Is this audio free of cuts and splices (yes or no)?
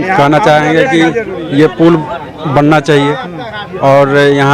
yes